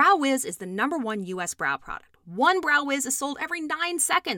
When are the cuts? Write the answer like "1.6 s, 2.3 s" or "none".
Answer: none